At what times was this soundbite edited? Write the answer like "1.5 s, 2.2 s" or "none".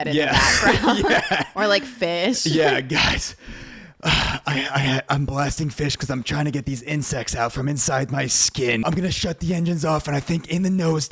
8.8 s